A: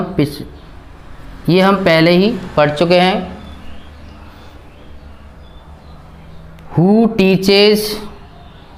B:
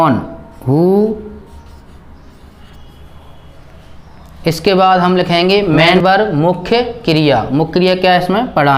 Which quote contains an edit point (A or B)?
B